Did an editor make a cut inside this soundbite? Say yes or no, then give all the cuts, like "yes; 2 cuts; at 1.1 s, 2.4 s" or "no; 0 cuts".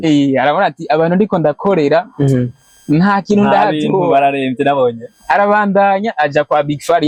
no; 0 cuts